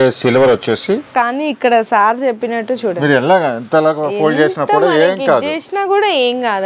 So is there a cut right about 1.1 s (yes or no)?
yes